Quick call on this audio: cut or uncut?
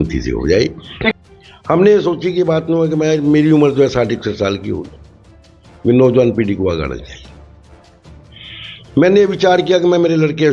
cut